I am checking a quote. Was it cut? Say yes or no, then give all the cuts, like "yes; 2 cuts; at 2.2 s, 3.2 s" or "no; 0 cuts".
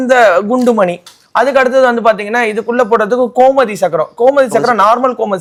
no; 0 cuts